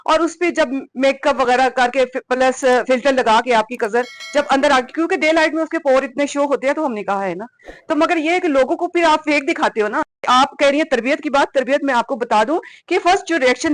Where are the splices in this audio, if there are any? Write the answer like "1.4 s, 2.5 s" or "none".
10.3 s